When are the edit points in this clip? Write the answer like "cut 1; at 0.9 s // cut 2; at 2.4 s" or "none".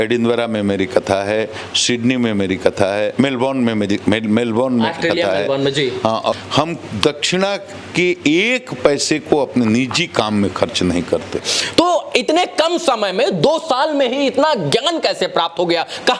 cut 1; at 6.4 s // cut 2; at 11.5 s

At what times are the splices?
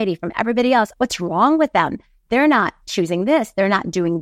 cut 1; at 0.9 s // cut 2; at 2.8 s

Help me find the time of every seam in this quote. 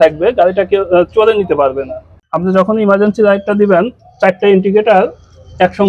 cut 1; at 2.1 s

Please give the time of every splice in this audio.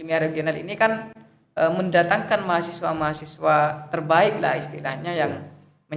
none

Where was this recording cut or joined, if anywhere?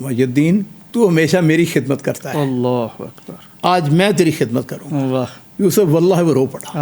cut 1; at 5.4 s

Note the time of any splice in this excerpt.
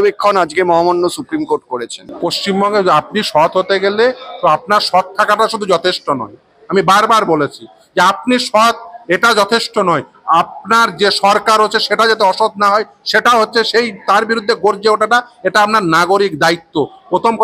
cut 1; at 2.1 s

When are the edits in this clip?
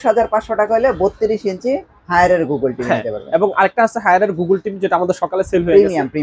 none

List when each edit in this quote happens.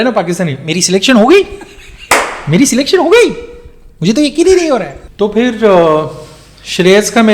none

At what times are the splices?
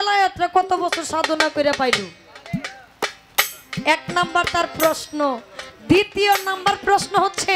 none

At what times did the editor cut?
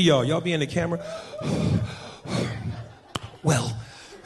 cut 1; at 2.8 s

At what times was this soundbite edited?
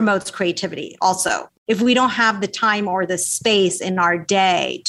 cut 1; at 1.6 s

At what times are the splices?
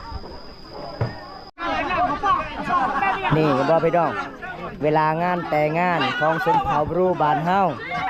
cut 1; at 1.4 s

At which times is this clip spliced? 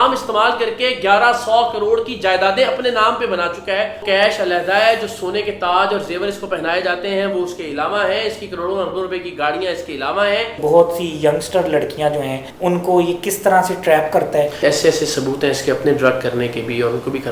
cut 1; at 4.0 s // cut 2; at 10.6 s // cut 3; at 12.4 s // cut 4; at 14.6 s

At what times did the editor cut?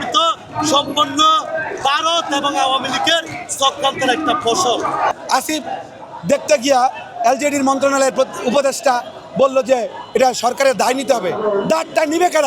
cut 1; at 5.1 s

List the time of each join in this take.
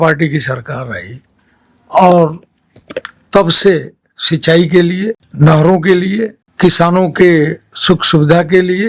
cut 1; at 5.2 s // cut 2; at 6.4 s

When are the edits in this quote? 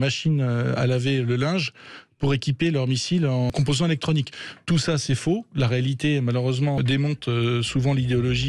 cut 1; at 3.5 s // cut 2; at 6.8 s

